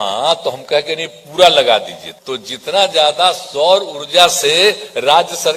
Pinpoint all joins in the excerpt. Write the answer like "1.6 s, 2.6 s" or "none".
2.0 s